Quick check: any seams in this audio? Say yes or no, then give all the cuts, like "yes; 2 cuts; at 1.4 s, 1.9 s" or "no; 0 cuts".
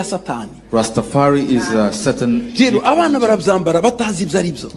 no; 0 cuts